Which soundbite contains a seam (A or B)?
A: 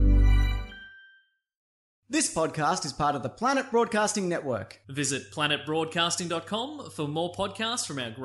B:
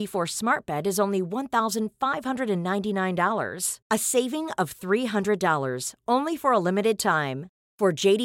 A